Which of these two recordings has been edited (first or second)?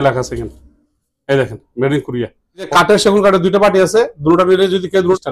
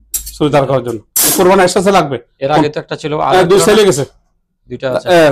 first